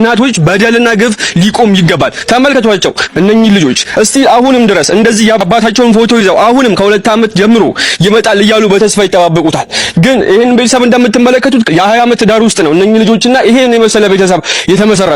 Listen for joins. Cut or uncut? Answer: uncut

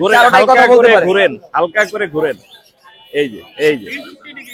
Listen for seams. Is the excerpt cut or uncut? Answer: uncut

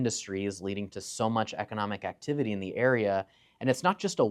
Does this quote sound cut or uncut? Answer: uncut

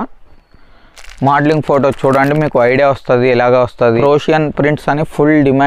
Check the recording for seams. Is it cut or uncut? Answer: cut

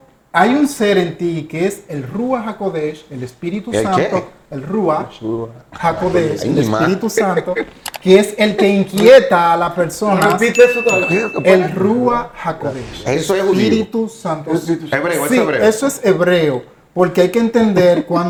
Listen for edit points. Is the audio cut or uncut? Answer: uncut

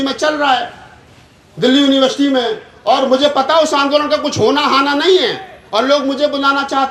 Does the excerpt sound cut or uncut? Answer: uncut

